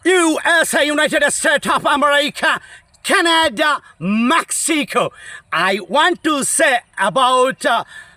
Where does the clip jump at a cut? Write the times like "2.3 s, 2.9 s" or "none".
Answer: none